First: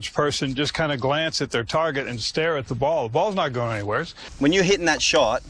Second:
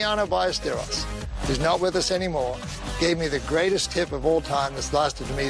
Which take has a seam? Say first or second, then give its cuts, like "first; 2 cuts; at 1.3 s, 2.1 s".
first; 1 cut; at 4.2 s